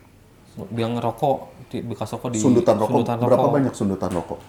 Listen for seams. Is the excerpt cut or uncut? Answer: uncut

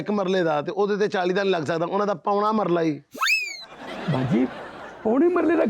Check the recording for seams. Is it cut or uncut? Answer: uncut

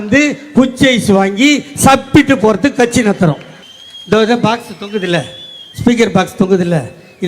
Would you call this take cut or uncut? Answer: cut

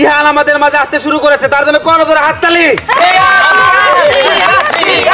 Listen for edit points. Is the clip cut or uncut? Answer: uncut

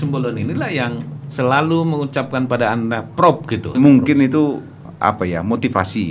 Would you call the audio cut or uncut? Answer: cut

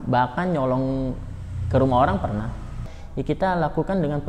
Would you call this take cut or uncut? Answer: cut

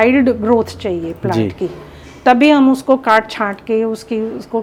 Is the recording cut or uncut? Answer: uncut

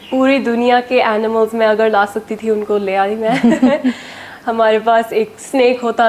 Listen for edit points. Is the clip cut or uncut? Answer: uncut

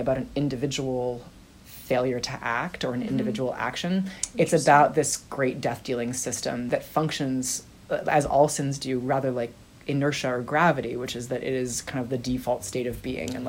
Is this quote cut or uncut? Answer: cut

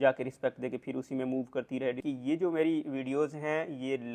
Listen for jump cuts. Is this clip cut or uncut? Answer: cut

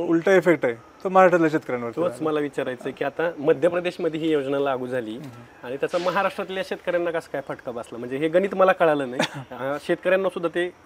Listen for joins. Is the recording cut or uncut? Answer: uncut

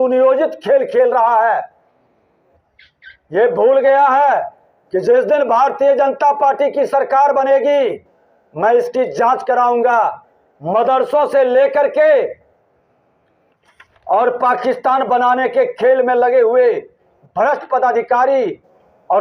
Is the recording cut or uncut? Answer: uncut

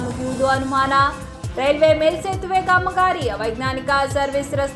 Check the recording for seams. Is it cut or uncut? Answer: uncut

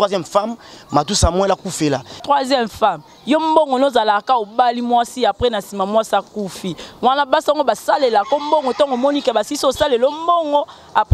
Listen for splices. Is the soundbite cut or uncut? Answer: cut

